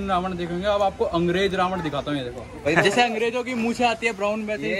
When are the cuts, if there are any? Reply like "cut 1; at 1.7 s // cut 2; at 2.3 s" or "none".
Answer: cut 1; at 2.7 s